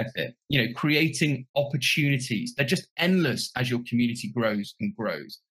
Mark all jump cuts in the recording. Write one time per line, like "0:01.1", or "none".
none